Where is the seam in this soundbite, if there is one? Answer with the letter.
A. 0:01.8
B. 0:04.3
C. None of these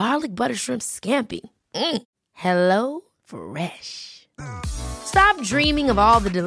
C